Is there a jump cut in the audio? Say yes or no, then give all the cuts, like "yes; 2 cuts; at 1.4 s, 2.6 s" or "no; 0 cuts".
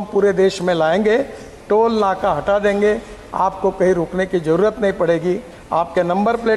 no; 0 cuts